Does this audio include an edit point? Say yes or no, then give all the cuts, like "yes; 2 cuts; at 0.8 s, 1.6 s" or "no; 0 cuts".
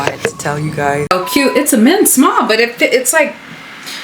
yes; 1 cut; at 1.1 s